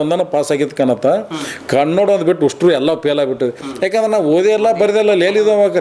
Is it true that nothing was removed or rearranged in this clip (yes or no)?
yes